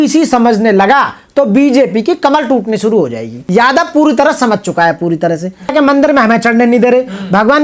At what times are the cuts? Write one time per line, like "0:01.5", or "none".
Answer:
0:03.4
0:05.7